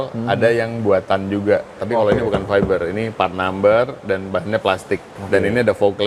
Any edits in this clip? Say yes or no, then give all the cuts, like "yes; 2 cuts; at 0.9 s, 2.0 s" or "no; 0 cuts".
yes; 2 cuts; at 1.8 s, 5.1 s